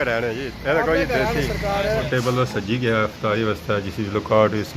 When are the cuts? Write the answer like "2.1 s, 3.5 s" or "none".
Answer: 2.1 s